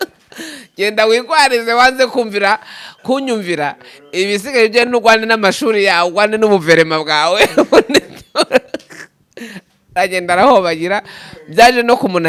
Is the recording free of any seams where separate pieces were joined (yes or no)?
yes